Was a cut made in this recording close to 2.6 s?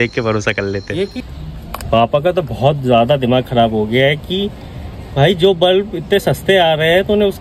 no; 1 cut; at 1.2 s

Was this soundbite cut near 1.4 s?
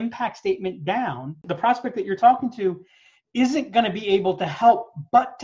yes; 1 cut; at 1.4 s

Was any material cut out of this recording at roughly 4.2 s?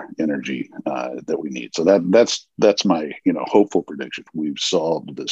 yes; 1 cut; at 4.2 s

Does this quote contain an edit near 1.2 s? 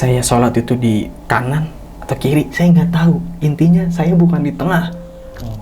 yes; 1 cut; at 1.2 s

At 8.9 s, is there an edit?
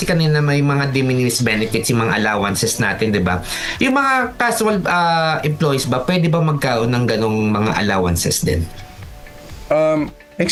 no; 0 cuts

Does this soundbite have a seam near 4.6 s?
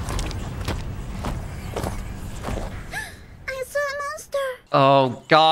yes; 1 cut; at 4.6 s

